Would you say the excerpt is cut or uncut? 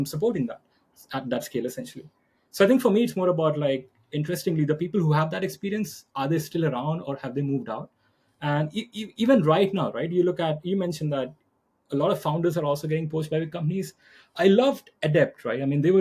uncut